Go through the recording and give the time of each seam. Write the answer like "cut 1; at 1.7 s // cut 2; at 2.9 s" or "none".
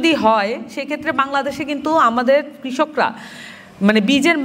none